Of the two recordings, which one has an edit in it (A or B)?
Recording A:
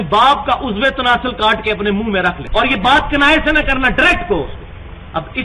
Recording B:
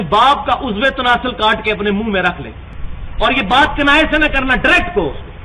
A